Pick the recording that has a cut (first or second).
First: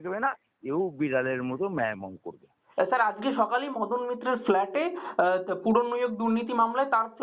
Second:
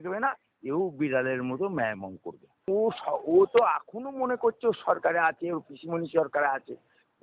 second